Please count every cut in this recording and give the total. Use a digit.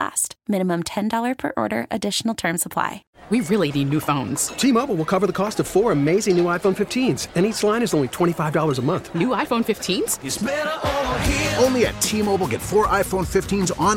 1